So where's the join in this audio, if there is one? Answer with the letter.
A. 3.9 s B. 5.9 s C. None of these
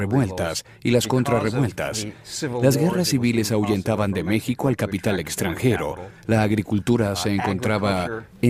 A